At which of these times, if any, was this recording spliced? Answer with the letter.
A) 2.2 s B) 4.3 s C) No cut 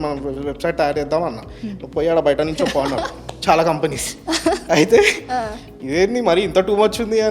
C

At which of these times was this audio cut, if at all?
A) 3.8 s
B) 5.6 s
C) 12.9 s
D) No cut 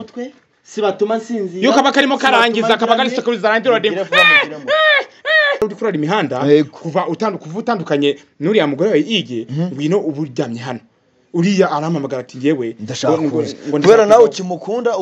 B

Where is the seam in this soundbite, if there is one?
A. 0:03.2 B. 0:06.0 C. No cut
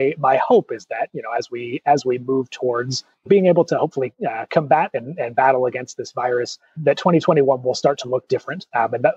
A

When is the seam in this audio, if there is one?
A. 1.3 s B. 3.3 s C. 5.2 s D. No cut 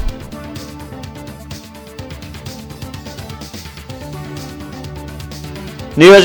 C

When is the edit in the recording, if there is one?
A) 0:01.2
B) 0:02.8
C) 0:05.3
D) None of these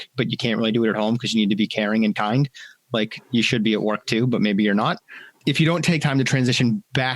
C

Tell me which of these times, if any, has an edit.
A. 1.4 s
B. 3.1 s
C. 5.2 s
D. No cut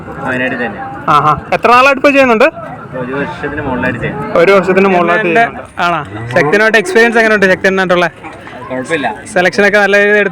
C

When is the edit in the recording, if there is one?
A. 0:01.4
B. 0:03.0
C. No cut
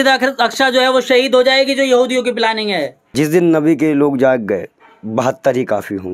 B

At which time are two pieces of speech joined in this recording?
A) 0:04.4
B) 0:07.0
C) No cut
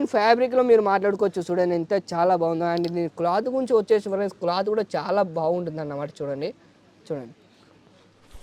C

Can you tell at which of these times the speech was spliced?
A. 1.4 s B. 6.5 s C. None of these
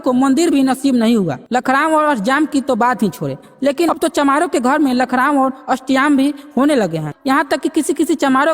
A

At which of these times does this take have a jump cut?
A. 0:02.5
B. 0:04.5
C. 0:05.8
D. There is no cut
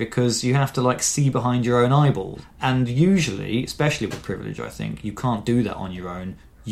A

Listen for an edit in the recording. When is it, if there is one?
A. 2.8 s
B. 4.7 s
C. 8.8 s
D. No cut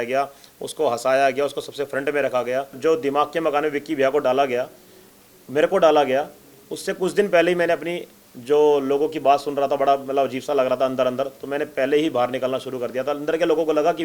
A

